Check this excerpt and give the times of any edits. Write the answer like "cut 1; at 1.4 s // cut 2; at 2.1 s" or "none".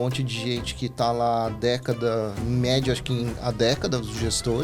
cut 1; at 2.4 s